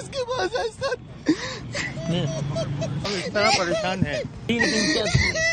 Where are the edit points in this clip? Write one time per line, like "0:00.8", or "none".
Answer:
0:03.0
0:04.5